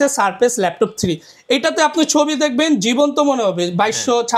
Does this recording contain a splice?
yes; 1 cut; at 1.3 s

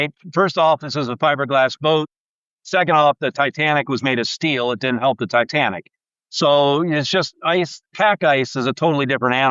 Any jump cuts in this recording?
no; 0 cuts

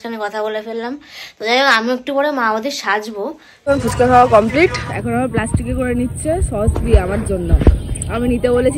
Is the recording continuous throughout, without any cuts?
no; 1 cut; at 3.5 s

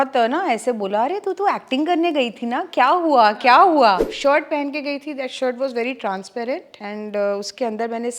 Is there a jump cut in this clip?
yes; 2 cuts; at 4.1 s, 6.7 s

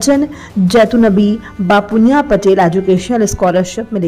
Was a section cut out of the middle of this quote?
no; 0 cuts

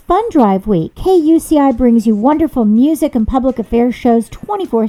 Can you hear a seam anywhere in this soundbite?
yes; 1 cut; at 0.9 s

